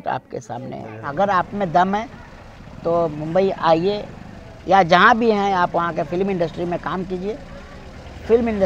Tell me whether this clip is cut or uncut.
cut